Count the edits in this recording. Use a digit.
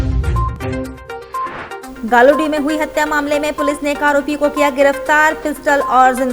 1